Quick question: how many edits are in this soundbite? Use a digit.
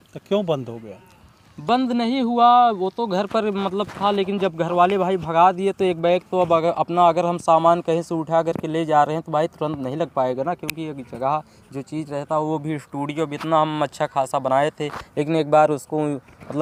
0